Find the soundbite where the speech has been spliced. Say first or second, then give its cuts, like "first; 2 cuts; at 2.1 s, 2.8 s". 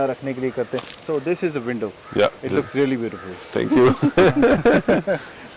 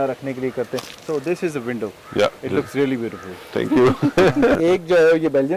second; 1 cut; at 4.6 s